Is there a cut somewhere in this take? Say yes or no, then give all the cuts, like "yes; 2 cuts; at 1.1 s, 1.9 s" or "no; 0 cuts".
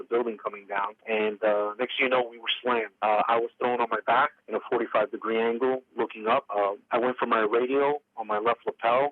no; 0 cuts